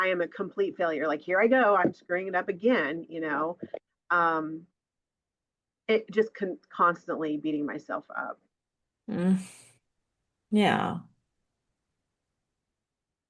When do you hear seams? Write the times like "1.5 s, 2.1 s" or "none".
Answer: none